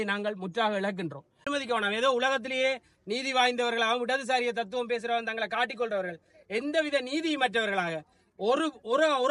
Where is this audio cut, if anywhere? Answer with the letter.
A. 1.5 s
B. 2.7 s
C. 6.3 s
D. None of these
A